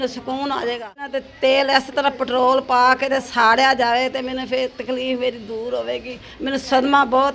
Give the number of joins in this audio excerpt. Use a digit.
1